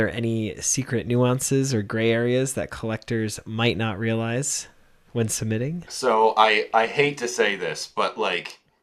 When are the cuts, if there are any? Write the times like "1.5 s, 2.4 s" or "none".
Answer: 5.9 s